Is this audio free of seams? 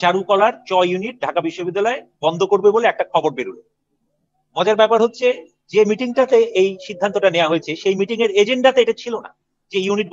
yes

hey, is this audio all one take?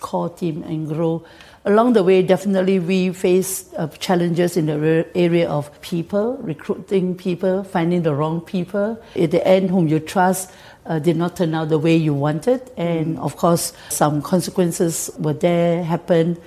no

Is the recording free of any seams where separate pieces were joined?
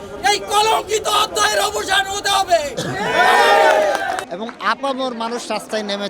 no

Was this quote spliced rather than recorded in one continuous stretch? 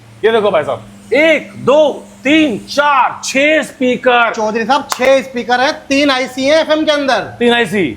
no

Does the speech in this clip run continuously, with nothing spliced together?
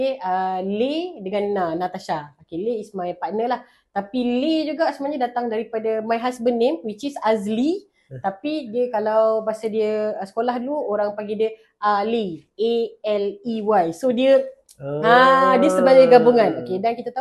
yes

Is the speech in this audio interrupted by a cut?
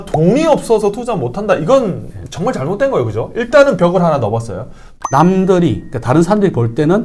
yes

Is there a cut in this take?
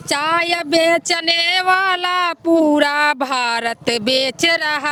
no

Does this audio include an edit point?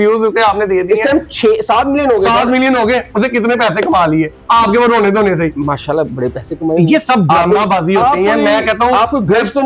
no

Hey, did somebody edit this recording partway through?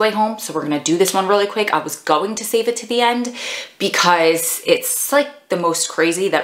no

